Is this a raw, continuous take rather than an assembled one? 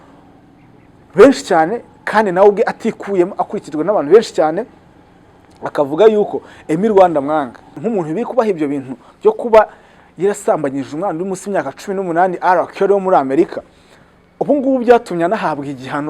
no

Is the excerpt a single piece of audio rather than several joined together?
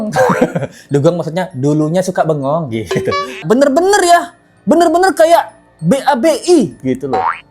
no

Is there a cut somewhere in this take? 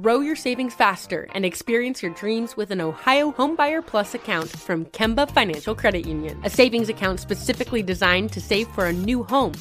no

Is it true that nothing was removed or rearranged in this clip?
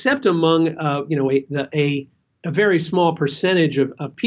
yes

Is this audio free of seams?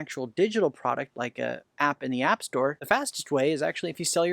no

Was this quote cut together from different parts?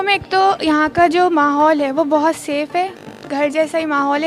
no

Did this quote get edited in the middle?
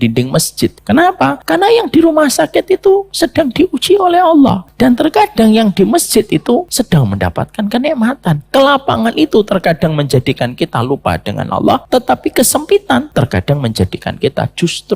yes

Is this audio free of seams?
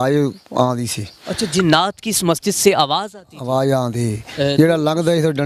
yes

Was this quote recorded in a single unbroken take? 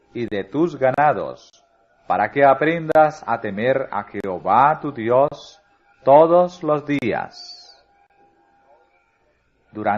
yes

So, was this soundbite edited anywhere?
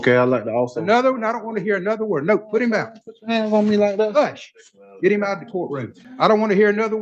yes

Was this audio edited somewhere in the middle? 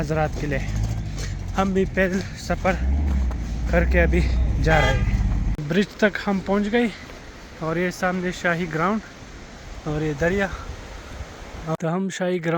yes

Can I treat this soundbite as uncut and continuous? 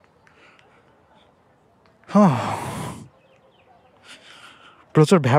yes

